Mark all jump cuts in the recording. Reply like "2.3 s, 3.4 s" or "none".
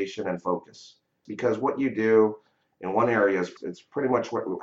1.2 s, 3.5 s